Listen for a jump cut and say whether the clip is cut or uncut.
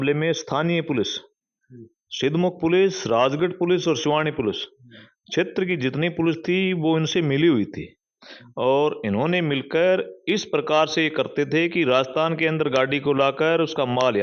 uncut